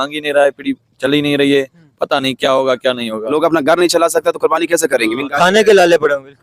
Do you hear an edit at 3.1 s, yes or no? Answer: yes